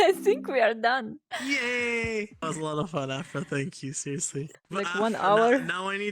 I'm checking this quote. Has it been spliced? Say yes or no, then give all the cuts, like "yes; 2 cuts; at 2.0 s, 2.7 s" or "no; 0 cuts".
yes; 3 cuts; at 1.2 s, 2.4 s, 4.5 s